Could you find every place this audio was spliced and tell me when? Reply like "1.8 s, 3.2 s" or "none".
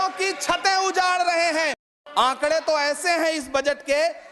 1.8 s